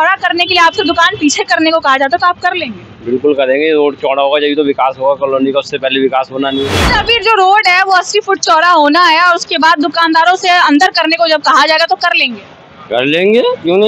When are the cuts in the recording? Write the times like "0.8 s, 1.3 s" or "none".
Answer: 6.8 s